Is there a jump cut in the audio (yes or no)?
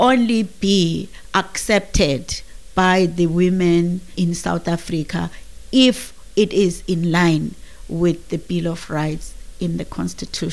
no